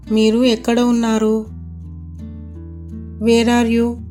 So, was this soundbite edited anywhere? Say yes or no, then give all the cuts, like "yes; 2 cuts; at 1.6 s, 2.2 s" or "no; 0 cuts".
no; 0 cuts